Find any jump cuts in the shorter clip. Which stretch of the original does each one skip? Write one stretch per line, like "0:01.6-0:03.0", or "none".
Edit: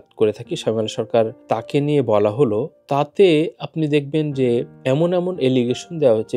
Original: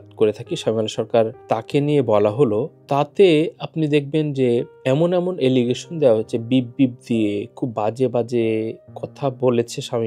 none

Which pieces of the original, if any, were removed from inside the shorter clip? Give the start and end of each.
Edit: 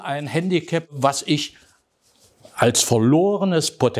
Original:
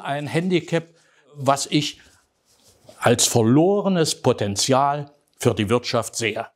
0:00.9-0:01.3

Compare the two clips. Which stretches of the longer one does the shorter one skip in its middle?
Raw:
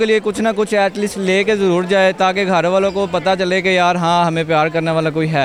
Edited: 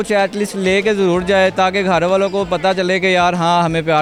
none

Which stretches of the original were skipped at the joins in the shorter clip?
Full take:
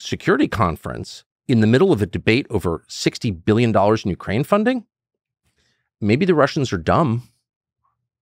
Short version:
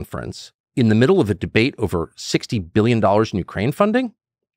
none

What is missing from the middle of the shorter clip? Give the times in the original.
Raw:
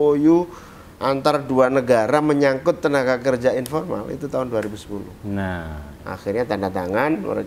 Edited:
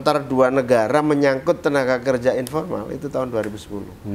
none

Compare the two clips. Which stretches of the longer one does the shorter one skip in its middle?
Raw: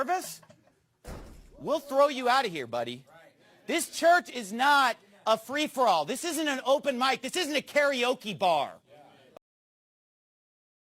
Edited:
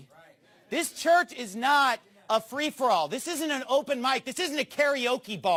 none

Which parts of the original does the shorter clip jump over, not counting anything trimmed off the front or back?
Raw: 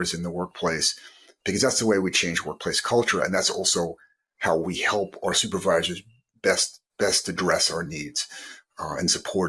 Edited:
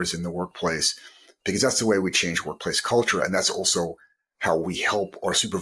none

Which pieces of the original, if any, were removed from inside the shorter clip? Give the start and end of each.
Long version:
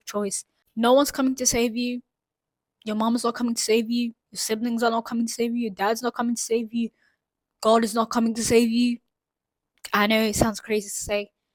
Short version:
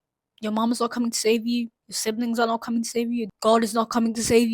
0:05.7-0:07.5

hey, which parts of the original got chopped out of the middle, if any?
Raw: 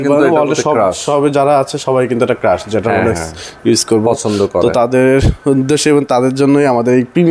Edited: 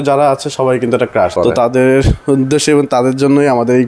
0:02.6-0:04.5

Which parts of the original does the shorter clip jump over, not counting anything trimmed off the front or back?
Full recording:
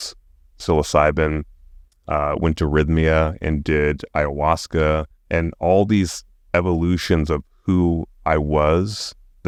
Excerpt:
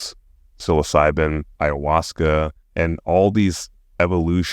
0:01.5-0:04.0

